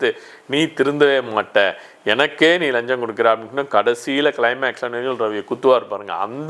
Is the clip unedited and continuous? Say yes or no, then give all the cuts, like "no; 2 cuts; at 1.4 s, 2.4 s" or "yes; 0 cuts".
yes; 0 cuts